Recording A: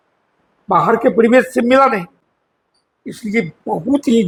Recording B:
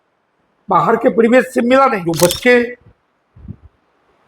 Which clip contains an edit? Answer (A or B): B